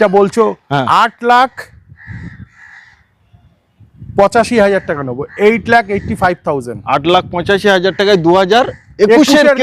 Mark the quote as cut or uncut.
uncut